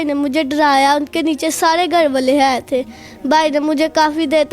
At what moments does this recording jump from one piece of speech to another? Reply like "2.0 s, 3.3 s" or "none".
none